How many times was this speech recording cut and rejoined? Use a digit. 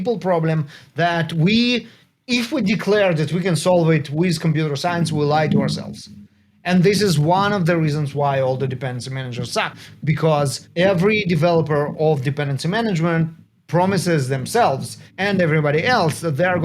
0